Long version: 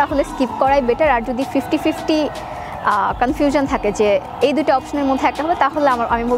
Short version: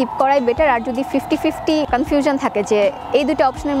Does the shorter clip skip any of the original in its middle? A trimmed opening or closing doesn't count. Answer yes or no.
yes